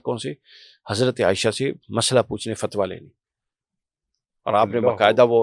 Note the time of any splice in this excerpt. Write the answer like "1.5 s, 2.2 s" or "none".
none